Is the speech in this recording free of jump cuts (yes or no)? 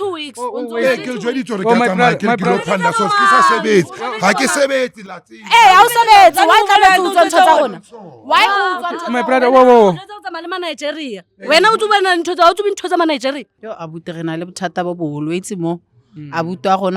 no